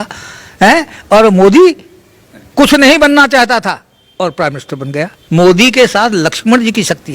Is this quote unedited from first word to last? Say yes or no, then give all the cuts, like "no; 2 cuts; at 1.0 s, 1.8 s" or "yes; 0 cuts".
no; 1 cut; at 5.2 s